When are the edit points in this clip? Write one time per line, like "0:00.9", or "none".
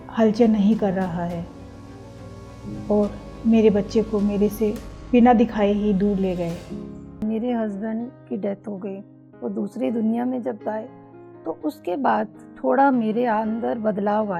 0:07.2